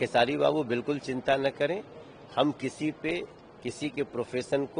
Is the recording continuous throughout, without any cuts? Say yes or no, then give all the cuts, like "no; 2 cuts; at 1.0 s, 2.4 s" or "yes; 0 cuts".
yes; 0 cuts